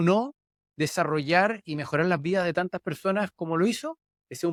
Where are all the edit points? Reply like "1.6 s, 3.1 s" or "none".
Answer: none